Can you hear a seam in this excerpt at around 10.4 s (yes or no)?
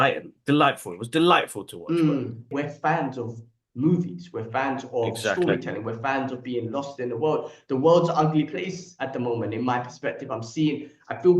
no